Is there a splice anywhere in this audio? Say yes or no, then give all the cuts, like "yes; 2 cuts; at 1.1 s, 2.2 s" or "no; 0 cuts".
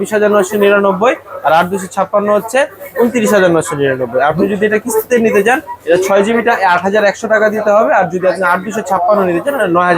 no; 0 cuts